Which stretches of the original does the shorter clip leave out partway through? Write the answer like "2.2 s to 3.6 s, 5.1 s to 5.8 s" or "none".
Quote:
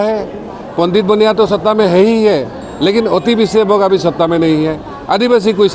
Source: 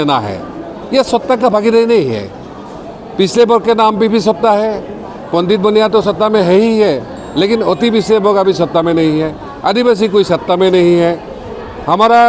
none